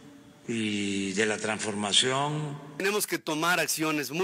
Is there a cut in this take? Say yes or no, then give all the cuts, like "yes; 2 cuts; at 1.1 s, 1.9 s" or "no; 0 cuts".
yes; 1 cut; at 2.8 s